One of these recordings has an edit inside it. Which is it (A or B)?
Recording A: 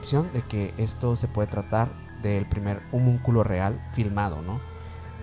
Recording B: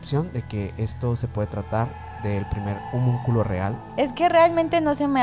B